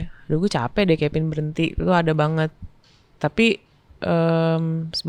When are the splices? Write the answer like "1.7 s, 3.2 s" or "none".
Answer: none